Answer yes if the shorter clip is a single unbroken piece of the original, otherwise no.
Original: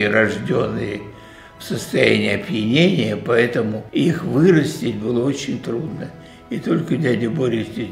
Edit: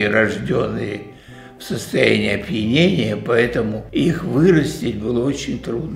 yes